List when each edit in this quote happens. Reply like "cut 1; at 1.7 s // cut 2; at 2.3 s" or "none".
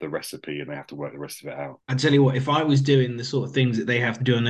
cut 1; at 1.8 s